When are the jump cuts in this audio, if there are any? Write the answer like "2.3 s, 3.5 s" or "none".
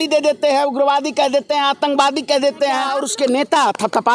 2.9 s